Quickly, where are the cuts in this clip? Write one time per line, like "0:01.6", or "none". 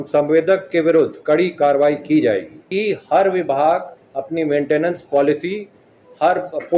0:02.6
0:04.0

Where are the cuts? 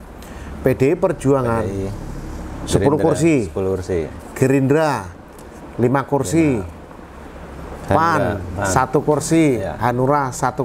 none

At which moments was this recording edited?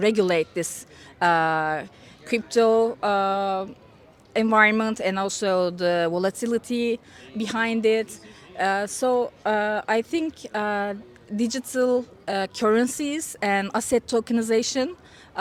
none

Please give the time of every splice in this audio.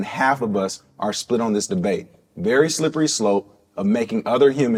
none

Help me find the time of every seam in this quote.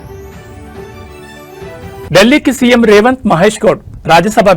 0:02.1

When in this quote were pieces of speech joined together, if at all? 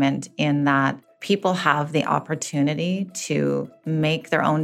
0:01.1
0:03.7

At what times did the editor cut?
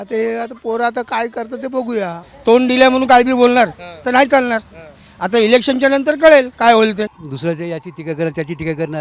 0:02.2
0:07.2

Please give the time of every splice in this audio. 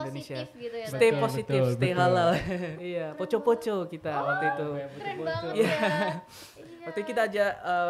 0:02.8

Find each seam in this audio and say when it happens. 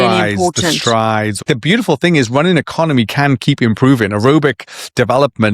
0:01.4

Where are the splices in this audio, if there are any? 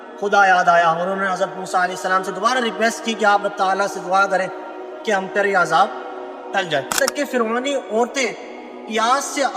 0:07.0

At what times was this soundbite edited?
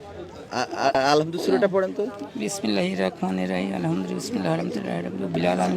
0:00.9

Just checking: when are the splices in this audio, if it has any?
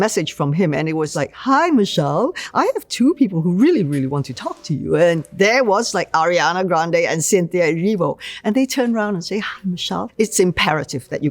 0:01.2

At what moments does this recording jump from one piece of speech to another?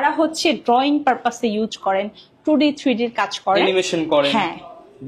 none

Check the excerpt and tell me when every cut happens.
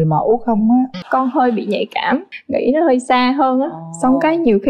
0:01.0
0:02.4

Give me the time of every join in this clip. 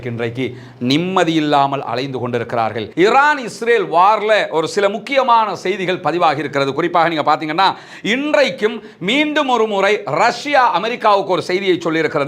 0:02.8

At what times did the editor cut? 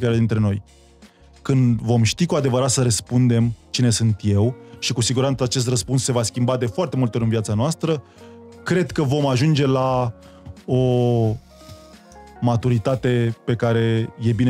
none

